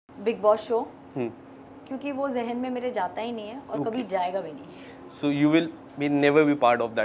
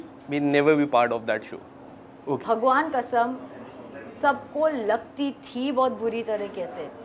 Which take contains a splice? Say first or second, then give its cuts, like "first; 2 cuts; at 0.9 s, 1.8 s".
second; 1 cut; at 2.4 s